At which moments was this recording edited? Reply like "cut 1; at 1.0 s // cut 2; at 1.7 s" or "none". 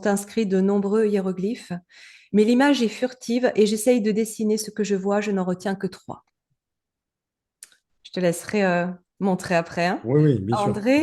none